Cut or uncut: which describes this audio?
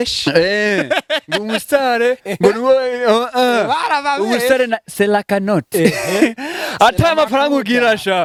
uncut